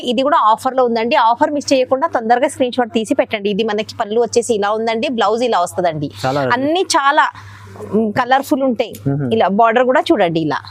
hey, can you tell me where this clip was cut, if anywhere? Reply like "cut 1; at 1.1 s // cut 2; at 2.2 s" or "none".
none